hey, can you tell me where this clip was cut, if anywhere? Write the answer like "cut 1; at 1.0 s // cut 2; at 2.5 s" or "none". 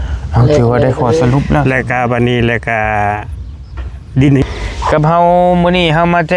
cut 1; at 4.4 s